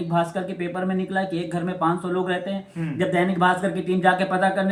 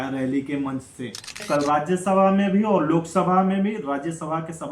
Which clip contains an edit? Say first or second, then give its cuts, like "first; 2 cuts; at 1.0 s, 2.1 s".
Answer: second; 1 cut; at 1.4 s